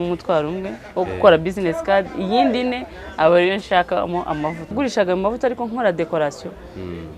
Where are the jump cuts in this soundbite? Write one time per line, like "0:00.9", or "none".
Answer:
0:04.7